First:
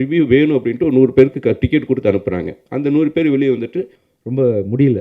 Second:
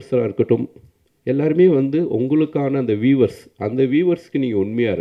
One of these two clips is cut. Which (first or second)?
first